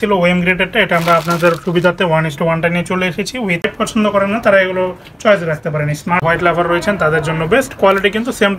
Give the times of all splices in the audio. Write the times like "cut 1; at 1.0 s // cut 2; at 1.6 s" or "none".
cut 1; at 3.6 s // cut 2; at 6.2 s